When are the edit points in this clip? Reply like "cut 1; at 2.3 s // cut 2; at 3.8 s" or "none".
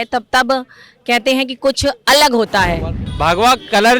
cut 1; at 3.0 s